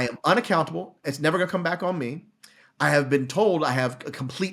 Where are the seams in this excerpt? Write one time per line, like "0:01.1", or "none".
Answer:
0:01.0

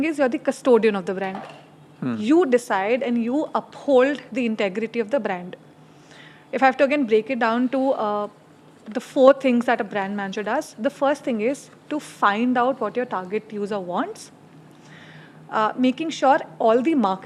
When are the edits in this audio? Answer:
none

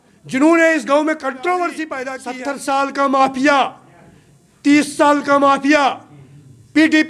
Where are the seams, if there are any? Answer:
0:02.3

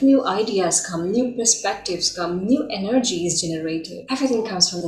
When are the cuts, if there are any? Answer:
0:03.9

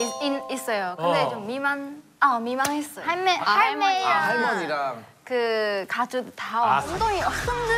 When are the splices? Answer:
0:03.0
0:06.9

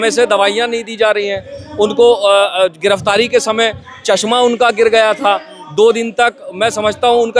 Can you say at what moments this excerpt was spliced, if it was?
none

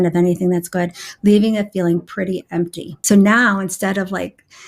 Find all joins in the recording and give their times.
0:02.9

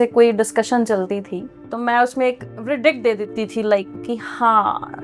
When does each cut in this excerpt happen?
0:01.5

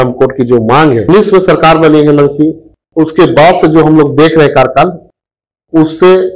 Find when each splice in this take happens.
0:01.0

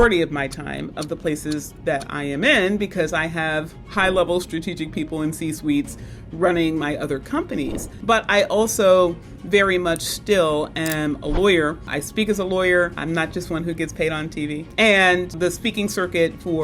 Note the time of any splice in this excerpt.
0:07.9
0:11.9
0:13.0
0:14.7
0:15.3

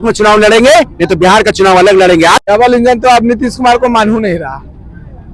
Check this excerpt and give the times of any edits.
0:02.4

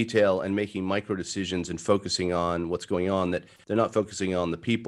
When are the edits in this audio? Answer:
none

